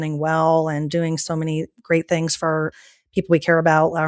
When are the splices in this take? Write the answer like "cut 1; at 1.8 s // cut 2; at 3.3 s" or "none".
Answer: cut 1; at 2.7 s